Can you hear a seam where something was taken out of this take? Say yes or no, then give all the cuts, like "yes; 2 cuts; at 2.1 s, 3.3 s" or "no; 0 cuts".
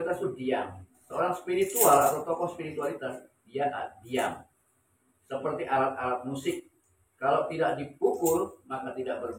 yes; 1 cut; at 1.0 s